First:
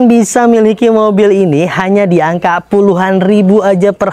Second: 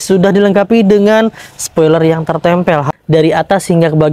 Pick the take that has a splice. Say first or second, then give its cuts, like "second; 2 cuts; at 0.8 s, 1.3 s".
second; 1 cut; at 2.9 s